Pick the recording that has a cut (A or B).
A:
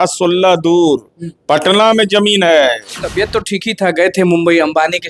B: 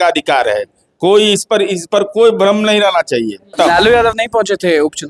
B